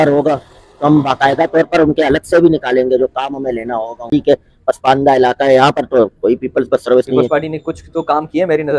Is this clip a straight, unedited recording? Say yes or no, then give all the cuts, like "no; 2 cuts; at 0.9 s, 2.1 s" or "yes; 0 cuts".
no; 1 cut; at 4.1 s